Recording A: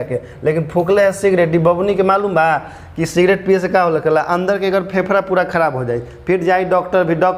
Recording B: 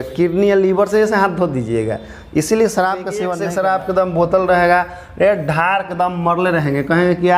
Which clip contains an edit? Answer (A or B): B